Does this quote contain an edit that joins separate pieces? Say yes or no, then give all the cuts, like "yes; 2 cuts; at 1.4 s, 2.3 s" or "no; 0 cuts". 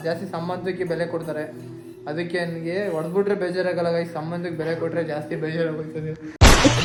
no; 0 cuts